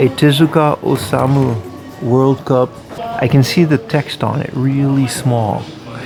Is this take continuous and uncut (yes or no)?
yes